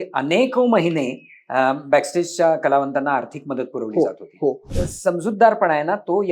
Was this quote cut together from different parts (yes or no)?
yes